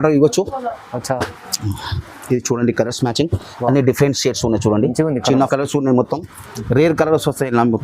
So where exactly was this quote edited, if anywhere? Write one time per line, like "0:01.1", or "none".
0:05.5